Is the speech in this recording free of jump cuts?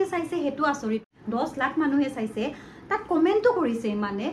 no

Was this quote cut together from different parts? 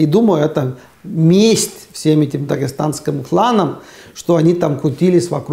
no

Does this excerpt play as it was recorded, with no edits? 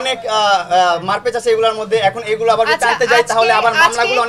yes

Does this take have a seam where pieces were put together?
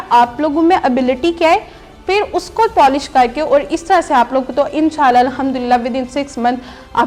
yes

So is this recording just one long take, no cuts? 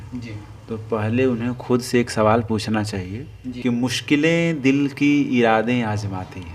no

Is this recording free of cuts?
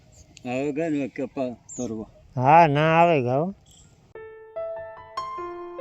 yes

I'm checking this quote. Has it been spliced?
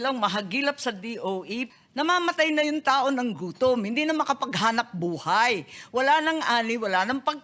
yes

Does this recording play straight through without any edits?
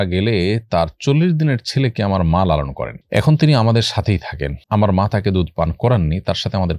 yes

